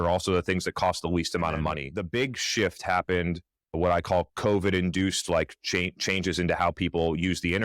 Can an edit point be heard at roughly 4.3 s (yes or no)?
no